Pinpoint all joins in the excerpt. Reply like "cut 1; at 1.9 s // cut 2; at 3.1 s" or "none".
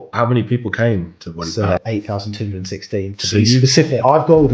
cut 1; at 1.8 s